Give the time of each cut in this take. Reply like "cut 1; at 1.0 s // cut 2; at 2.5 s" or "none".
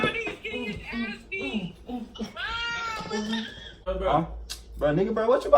cut 1; at 3.9 s